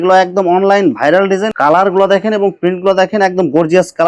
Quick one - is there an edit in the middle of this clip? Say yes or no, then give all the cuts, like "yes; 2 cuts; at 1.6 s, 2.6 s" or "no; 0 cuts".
yes; 1 cut; at 1.5 s